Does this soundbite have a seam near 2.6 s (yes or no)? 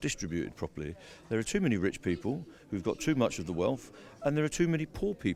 no